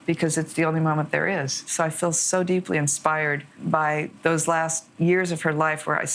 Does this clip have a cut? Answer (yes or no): yes